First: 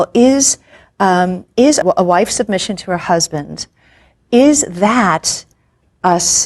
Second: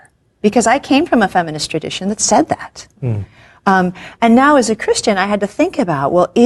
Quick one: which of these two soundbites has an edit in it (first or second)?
first